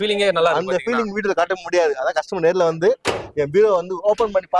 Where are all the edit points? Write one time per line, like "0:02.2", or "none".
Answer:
none